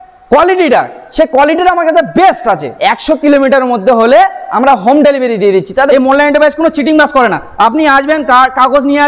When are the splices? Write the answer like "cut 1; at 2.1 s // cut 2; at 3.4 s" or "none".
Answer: cut 1; at 2.7 s // cut 2; at 5.9 s